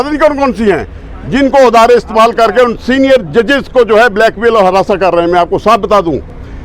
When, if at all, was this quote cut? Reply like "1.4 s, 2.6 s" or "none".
none

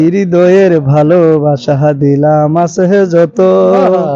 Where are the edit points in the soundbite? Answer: none

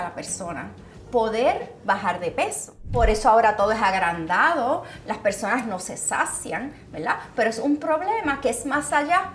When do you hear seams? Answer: 2.8 s

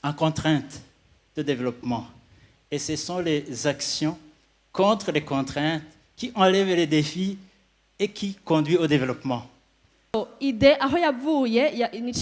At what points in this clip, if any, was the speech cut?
10.1 s

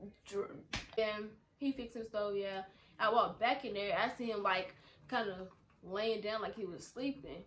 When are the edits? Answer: 1.0 s

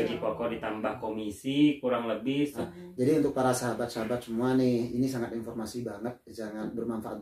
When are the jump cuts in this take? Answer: 2.6 s

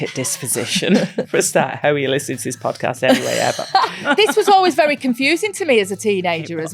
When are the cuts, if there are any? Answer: 1.2 s, 4.0 s

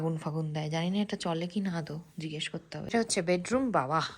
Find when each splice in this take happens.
2.9 s

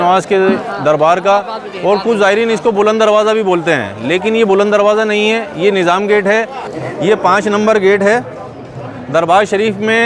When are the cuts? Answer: 6.7 s

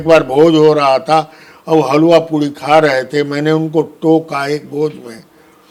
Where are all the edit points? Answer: none

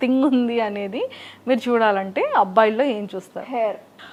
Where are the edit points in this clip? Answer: none

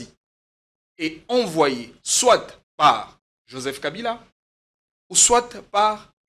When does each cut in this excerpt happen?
none

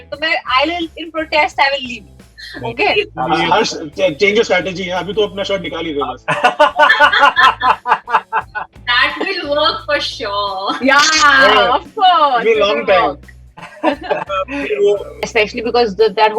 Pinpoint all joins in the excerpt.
3.1 s, 15.3 s

